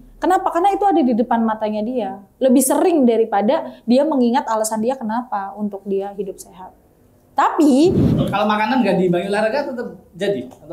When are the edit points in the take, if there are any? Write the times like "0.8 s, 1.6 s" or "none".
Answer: 8.1 s